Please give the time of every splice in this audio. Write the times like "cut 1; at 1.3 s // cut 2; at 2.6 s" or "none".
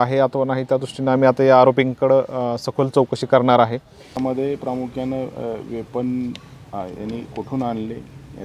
cut 1; at 4.2 s